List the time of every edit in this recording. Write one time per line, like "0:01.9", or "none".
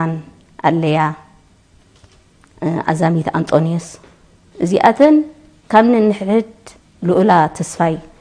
none

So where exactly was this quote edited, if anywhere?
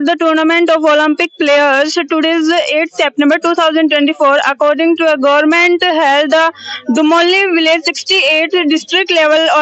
none

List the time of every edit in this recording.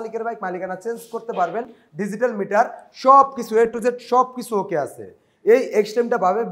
none

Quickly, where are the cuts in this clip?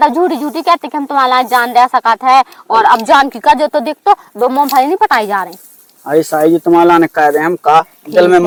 none

